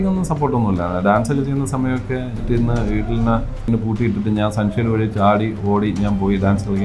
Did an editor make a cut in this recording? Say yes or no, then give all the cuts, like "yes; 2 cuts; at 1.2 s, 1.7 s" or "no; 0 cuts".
yes; 2 cuts; at 2.4 s, 3.6 s